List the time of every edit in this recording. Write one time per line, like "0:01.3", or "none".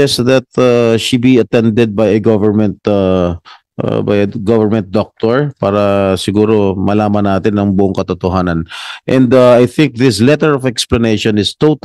none